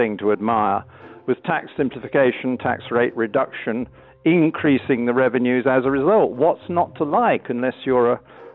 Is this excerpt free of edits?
yes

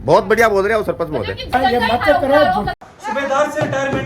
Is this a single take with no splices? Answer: no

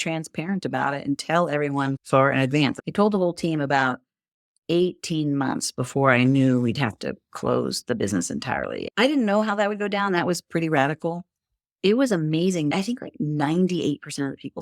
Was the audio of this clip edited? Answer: yes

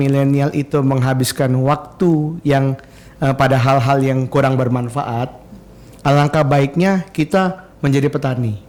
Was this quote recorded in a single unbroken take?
yes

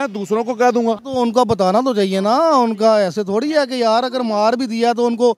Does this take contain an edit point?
yes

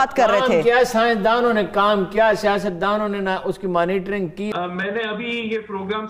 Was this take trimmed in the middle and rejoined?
yes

